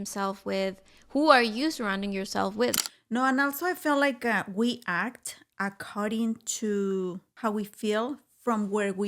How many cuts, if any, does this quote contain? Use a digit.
2